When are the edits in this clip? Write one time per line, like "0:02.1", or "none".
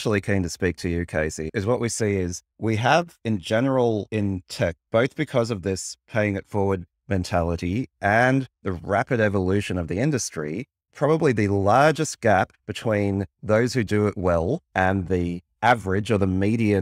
none